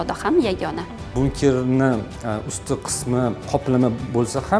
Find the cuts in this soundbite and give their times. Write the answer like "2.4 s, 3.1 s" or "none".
1.1 s, 3.4 s